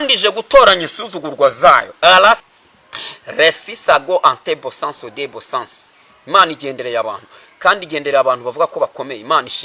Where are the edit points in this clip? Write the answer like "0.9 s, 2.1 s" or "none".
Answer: 2.4 s